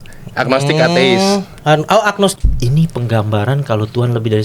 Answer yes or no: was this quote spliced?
yes